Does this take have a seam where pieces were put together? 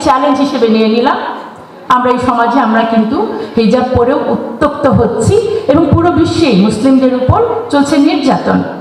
no; 0 cuts

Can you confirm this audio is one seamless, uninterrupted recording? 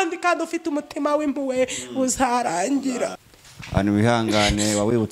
no; 1 cut; at 3.2 s

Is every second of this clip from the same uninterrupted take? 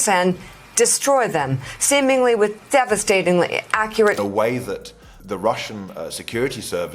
no; 1 cut; at 4.2 s

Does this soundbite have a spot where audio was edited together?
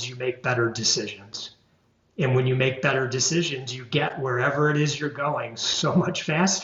no; 0 cuts

